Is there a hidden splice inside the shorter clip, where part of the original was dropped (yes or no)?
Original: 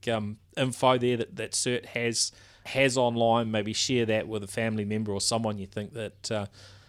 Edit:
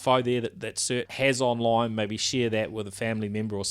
yes